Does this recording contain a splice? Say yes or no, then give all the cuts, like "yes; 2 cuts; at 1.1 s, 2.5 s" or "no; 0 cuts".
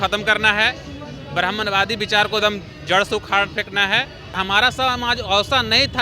yes; 1 cut; at 4.4 s